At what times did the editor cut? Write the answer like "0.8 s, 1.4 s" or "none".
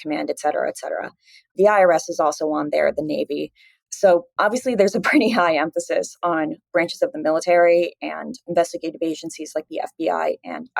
none